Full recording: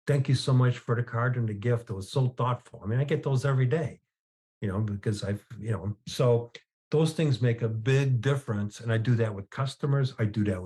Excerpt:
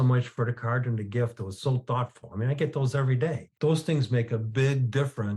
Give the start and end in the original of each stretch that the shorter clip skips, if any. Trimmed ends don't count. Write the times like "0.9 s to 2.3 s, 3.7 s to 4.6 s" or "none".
4.0 s to 6.8 s